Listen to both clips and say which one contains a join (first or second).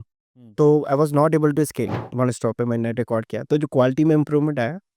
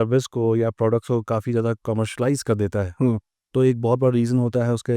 first